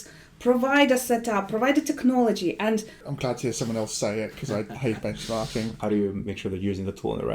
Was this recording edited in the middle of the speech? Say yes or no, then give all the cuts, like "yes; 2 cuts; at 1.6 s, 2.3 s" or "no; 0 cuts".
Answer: yes; 2 cuts; at 3.0 s, 5.8 s